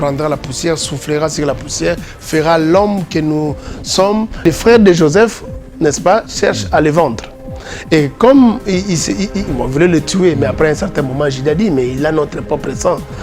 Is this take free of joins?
no; 1 cut; at 4.4 s

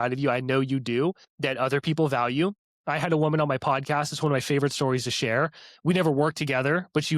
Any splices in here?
yes; 1 cut; at 1.3 s

